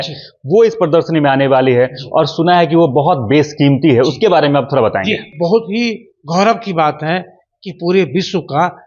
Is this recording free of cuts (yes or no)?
no